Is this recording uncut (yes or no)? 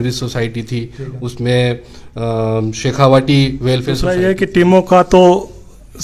no